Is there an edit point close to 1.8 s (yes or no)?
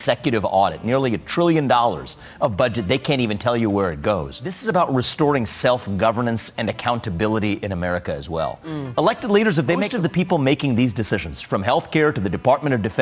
no